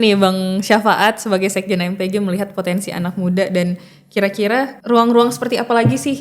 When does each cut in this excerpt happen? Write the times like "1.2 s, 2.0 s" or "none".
4.8 s

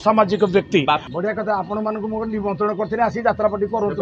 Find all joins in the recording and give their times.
1.1 s

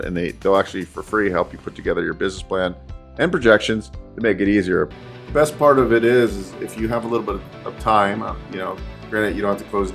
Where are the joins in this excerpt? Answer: 4.9 s

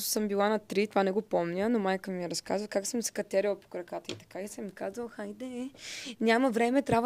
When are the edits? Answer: none

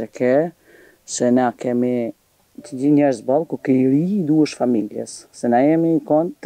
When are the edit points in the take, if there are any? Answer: none

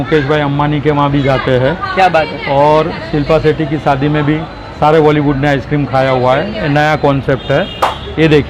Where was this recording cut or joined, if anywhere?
none

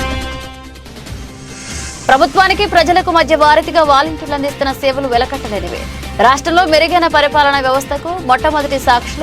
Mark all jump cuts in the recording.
1.9 s

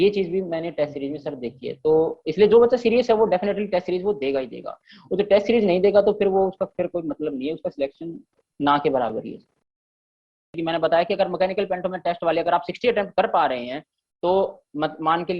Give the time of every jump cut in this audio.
10.0 s

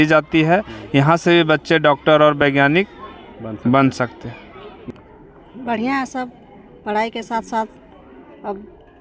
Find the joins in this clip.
4.7 s

